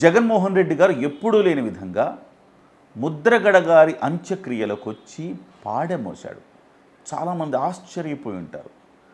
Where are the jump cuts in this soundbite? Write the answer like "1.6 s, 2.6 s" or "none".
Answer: none